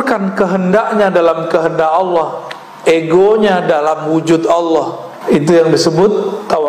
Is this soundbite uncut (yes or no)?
no